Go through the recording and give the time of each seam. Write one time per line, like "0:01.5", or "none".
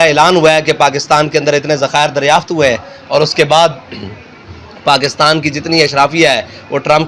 none

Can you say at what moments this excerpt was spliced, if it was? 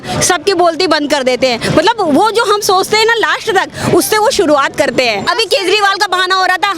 0:05.2

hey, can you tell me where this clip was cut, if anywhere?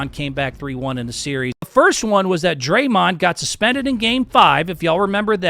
0:01.7

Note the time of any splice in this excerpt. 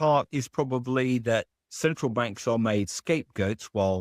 0:01.6

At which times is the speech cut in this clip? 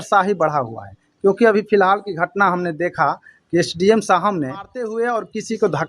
0:04.8

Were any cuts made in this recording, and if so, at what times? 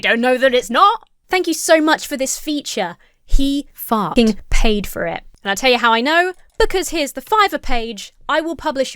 0:01.1

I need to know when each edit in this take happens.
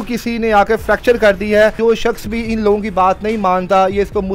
0:01.8

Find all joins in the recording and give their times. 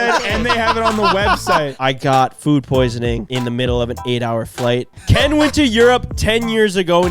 0:01.7
0:03.3
0:04.9

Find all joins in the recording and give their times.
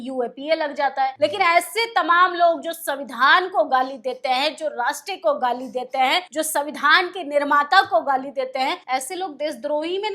0:01.1
0:06.3
0:08.8

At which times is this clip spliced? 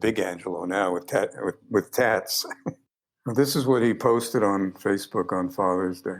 0:02.6

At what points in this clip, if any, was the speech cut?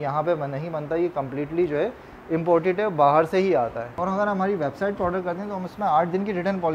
0:04.0

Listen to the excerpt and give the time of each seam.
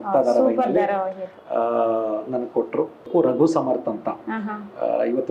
0:03.1

